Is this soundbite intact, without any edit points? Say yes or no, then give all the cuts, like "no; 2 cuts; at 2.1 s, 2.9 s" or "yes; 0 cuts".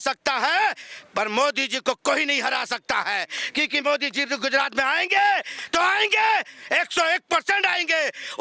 yes; 0 cuts